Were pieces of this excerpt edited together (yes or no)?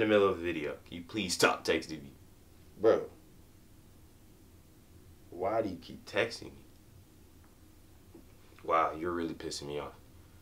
no